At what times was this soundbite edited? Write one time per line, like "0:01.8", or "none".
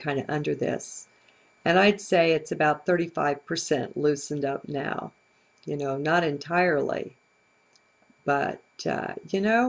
0:02.3